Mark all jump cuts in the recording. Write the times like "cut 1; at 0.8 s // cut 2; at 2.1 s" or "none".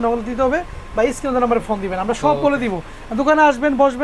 none